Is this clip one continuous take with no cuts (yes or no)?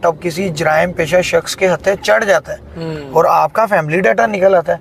yes